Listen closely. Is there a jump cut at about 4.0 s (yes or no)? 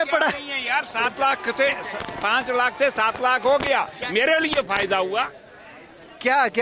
no